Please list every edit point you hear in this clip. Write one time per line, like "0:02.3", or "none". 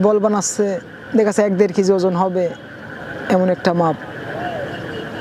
none